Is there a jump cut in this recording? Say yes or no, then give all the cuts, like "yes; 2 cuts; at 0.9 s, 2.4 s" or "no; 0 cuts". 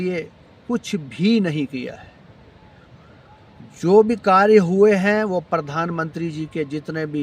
no; 0 cuts